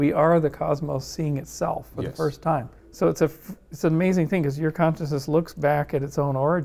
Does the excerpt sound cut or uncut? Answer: cut